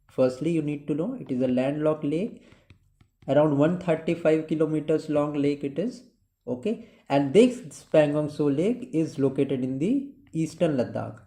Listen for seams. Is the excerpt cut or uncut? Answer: uncut